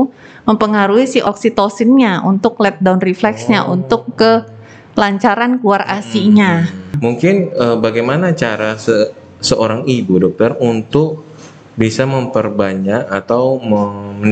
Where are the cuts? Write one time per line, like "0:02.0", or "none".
0:01.2
0:06.9